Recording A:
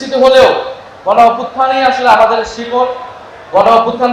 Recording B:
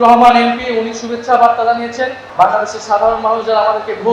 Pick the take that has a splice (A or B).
B